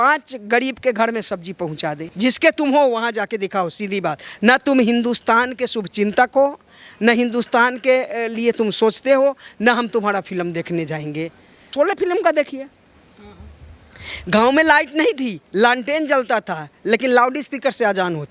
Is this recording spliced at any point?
yes; 2 cuts; at 2.0 s, 11.7 s

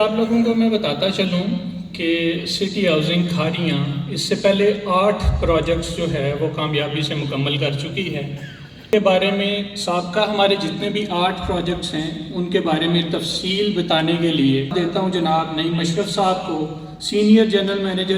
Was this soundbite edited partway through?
no; 0 cuts

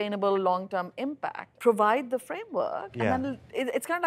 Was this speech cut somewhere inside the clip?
yes; 1 cut; at 1.4 s

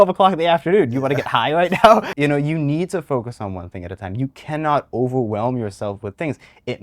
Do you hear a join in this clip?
yes; 1 cut; at 2.1 s

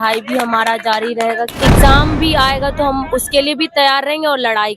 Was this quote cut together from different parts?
yes; 1 cut; at 1.5 s

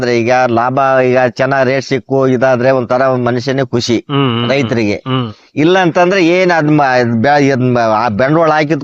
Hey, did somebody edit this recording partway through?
no; 0 cuts

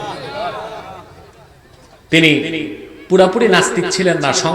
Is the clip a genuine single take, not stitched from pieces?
yes; 0 cuts

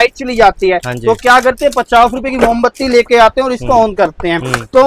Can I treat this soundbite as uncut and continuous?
yes; 0 cuts

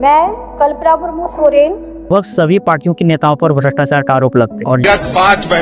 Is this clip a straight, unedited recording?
no; 2 cuts; at 2.1 s, 4.8 s

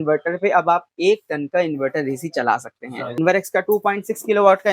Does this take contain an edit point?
yes; 1 cut; at 3.2 s

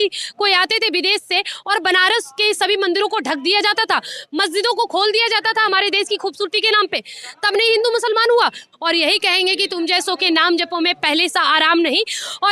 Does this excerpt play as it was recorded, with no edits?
no; 1 cut; at 8.7 s

